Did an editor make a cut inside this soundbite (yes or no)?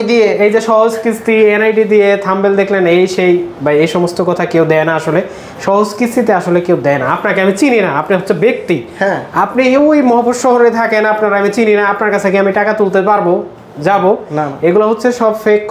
no